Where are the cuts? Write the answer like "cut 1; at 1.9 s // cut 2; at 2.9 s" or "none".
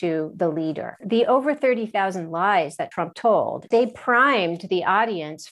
cut 1; at 0.9 s // cut 2; at 3.6 s